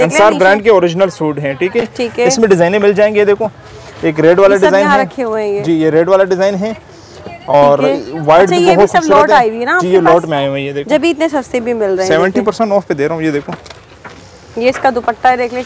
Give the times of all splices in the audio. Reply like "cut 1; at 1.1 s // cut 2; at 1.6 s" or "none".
none